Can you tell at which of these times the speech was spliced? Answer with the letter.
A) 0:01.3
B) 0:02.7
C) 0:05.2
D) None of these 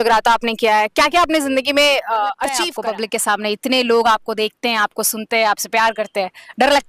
B